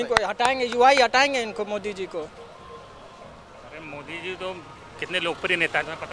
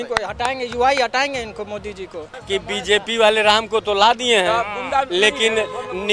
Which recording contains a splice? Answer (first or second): second